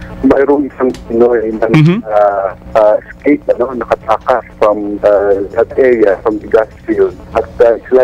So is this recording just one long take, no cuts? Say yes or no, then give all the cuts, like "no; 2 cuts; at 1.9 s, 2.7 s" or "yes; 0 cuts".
no; 3 cuts; at 2.6 s, 4.5 s, 7.2 s